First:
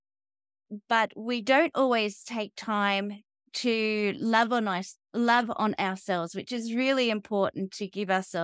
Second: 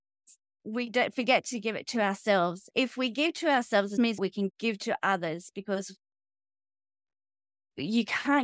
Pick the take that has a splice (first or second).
second